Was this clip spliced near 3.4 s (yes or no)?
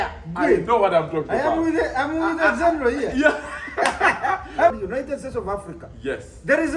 no